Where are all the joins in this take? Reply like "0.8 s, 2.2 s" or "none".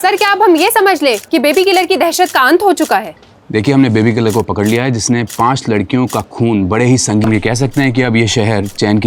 7.2 s